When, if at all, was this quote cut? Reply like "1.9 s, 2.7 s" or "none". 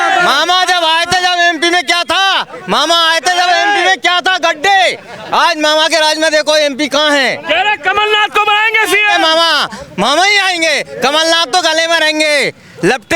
none